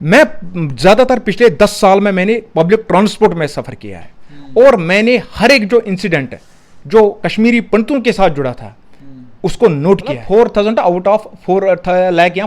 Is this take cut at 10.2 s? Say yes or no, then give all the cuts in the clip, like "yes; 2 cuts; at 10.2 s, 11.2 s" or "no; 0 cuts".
yes; 1 cut; at 10.2 s